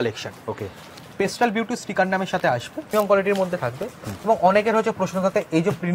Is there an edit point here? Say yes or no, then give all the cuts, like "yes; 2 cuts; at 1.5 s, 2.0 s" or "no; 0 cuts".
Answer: yes; 1 cut; at 2.9 s